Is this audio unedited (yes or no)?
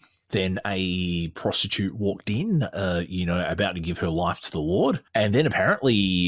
no